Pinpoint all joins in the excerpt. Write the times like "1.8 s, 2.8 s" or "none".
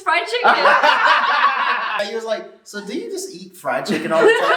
2.0 s